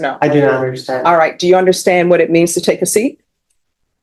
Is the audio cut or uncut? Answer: uncut